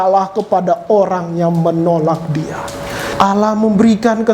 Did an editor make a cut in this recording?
yes; 1 cut; at 3.1 s

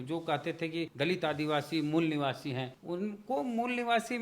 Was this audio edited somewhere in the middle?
yes; 2 cuts; at 0.9 s, 2.7 s

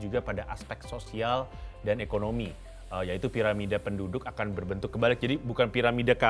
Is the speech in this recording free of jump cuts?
yes; 0 cuts

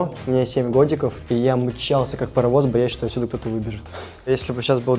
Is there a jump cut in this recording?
yes; 2 cuts; at 1.2 s, 4.3 s

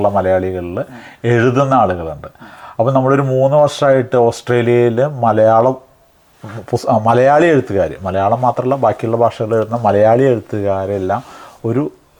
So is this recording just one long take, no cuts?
yes; 0 cuts

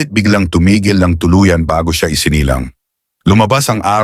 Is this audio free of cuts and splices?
yes; 0 cuts

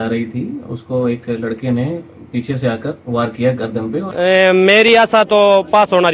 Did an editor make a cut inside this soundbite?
yes; 1 cut; at 4.1 s

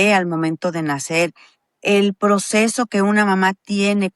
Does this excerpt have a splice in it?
no; 0 cuts

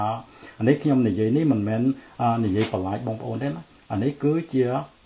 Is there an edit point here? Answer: no; 0 cuts

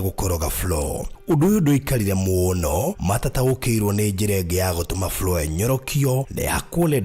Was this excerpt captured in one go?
yes; 0 cuts

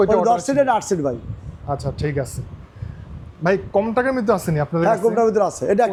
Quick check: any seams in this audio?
no; 0 cuts

